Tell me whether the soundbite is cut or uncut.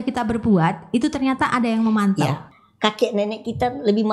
cut